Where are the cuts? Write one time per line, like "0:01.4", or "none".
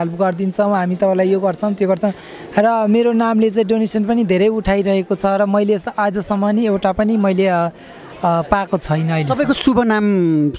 none